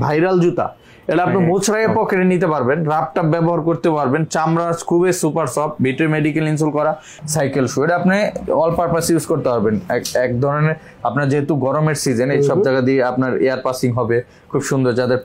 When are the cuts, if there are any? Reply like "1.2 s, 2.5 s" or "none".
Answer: 7.1 s